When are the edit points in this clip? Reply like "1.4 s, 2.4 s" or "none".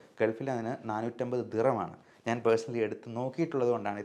none